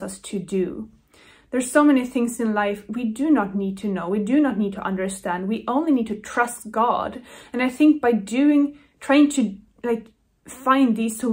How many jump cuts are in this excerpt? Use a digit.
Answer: 0